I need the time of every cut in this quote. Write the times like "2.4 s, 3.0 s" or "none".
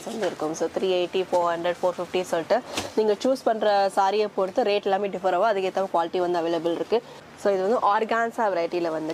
7.2 s